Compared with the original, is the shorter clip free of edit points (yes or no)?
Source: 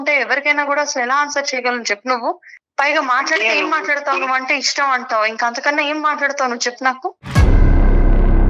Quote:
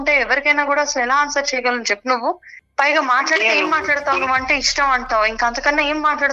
yes